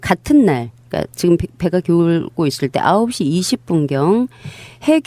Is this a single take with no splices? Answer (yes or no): yes